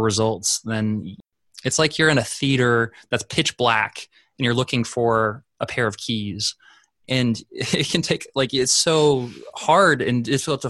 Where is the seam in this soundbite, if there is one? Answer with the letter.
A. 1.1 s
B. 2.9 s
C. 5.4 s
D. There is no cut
A